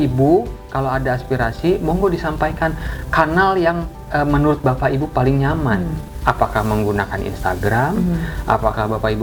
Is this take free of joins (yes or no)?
yes